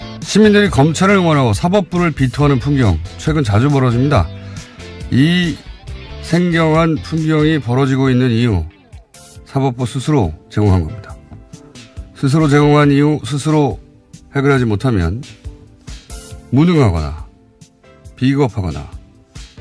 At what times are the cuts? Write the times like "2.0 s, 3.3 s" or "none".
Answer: 2.6 s